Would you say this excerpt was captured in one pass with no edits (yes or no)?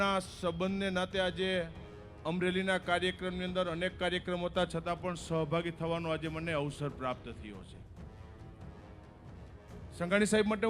yes